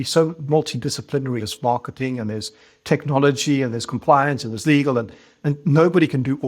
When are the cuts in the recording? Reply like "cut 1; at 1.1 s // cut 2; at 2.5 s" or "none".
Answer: cut 1; at 1.4 s

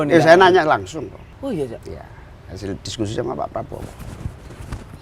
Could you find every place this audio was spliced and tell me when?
cut 1; at 1.2 s

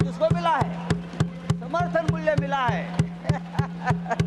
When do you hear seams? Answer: none

